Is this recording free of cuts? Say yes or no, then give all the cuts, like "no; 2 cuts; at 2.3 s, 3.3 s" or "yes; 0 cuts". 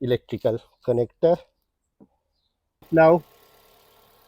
no; 1 cut; at 2.9 s